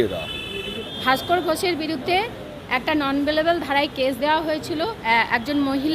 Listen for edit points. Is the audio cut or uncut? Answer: cut